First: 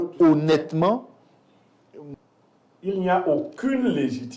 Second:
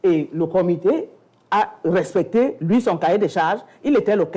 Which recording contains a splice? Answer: first; 1 cut; at 2.1 s

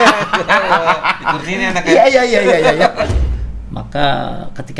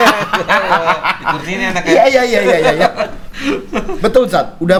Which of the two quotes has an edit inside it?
first; 1 cut; at 3.2 s

